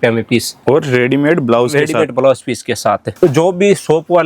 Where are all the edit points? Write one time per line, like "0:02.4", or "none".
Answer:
0:03.1

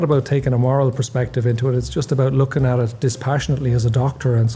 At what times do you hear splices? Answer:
none

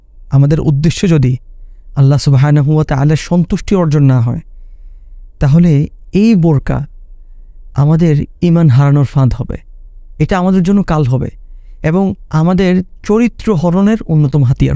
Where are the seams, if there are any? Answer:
none

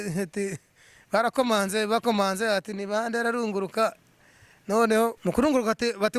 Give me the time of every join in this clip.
0:05.2

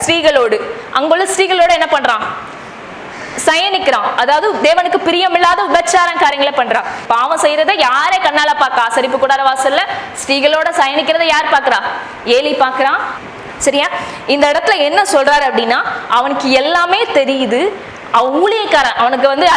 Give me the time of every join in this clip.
0:07.0
0:13.1

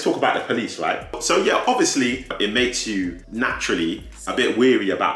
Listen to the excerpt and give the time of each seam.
0:02.3

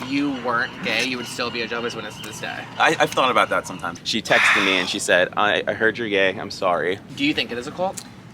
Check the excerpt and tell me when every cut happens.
0:04.0
0:07.1

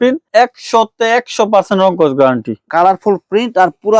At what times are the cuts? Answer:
0:02.6

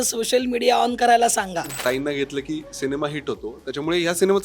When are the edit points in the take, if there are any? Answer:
0:01.8

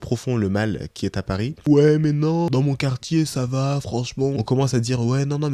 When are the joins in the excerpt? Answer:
0:01.5
0:02.5
0:04.3

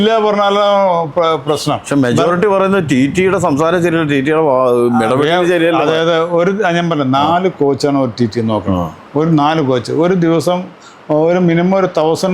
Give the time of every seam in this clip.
none

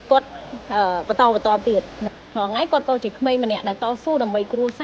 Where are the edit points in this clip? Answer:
0:02.0

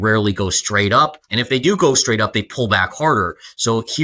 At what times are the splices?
0:01.3

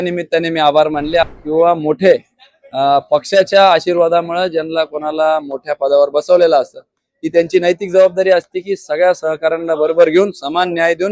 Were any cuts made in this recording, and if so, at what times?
0:01.2

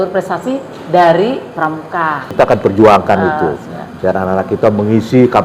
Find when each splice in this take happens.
0:02.3

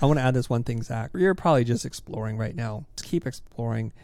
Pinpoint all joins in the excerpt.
0:01.1
0:03.0

